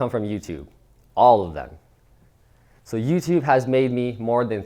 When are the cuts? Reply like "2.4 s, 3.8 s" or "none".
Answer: none